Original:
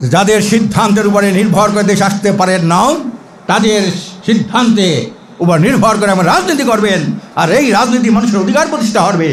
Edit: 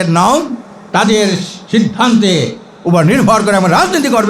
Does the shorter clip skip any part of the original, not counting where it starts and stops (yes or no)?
no